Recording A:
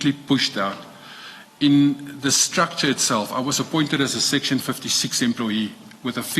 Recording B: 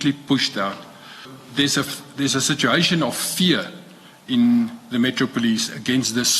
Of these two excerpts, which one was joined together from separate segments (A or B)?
B